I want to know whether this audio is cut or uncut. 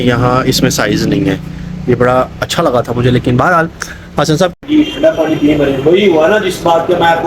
cut